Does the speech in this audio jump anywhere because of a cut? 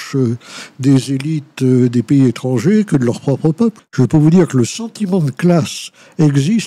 yes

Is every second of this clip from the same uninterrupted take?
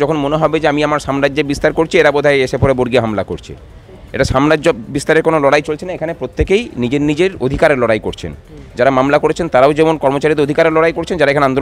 yes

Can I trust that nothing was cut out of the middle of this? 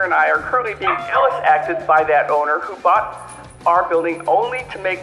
yes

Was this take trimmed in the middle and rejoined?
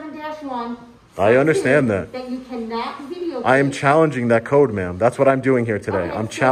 no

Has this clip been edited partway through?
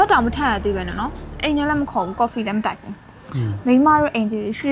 no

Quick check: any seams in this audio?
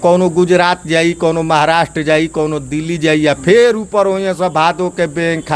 no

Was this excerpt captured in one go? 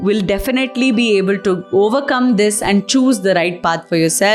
yes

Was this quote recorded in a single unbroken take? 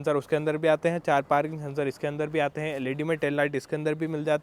yes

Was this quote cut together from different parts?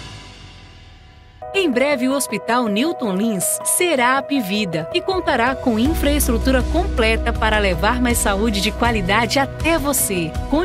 yes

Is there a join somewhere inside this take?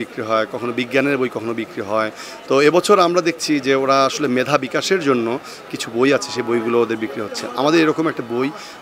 no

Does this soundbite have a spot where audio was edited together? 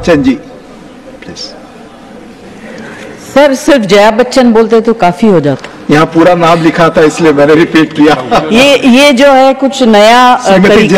no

